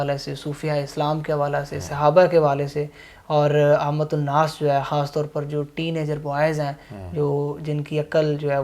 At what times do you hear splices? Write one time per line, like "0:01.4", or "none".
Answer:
none